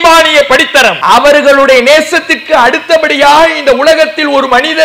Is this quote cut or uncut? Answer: cut